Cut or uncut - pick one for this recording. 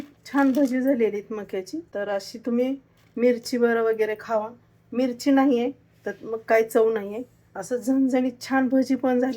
cut